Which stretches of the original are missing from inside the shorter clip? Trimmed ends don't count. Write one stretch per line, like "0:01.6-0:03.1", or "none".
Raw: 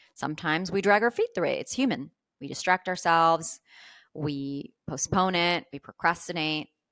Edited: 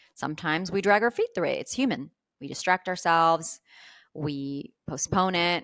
none